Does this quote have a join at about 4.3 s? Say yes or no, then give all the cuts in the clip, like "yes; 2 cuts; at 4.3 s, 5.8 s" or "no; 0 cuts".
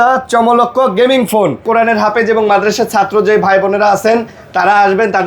no; 1 cut; at 1.6 s